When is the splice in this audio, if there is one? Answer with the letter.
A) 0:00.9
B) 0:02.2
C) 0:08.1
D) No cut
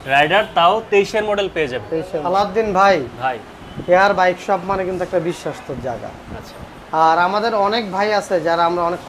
B